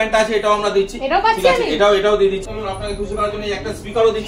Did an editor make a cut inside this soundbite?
yes; 1 cut; at 2.4 s

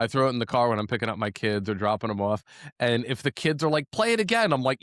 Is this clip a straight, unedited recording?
yes; 0 cuts

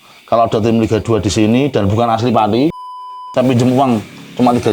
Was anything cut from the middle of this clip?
yes; 1 cut; at 2.8 s

